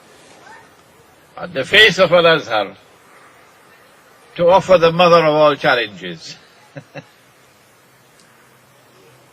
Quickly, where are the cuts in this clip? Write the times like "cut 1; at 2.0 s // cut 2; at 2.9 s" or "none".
cut 1; at 5.0 s